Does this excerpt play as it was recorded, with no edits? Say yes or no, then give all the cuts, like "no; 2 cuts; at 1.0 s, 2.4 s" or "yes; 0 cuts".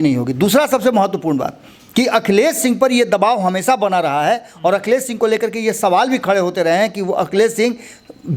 yes; 0 cuts